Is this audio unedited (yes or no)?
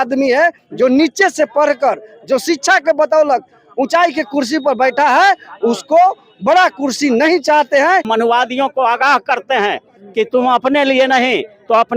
no